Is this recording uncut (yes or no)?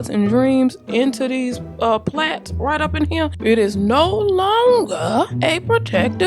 no